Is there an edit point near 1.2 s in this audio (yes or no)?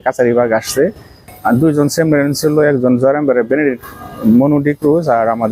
yes